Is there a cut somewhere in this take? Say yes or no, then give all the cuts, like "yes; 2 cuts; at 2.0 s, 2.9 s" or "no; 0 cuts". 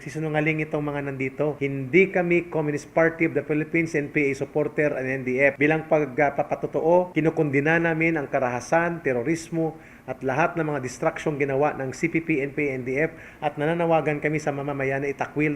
yes; 3 cuts; at 1.6 s, 5.6 s, 7.1 s